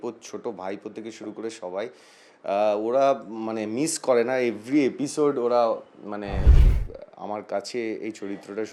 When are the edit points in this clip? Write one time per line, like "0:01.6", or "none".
0:06.5